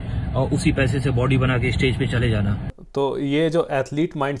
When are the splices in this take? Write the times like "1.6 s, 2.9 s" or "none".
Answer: 2.7 s